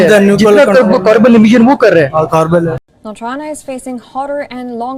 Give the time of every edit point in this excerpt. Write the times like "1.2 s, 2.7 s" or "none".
none